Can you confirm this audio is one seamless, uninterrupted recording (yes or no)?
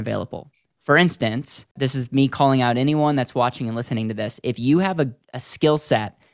no